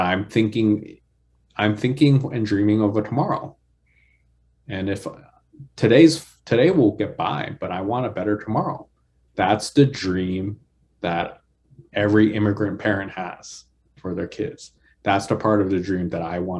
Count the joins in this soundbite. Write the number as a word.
zero